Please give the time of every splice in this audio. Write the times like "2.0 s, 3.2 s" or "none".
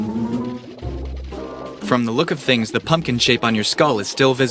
1.9 s